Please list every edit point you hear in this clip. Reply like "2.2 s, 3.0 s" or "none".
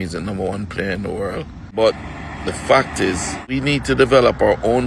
1.6 s, 3.5 s

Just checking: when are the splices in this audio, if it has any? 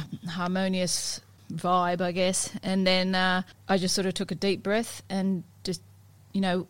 1.4 s, 3.5 s

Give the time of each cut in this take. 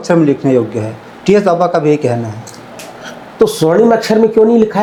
none

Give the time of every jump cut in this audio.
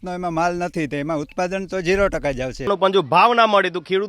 2.7 s

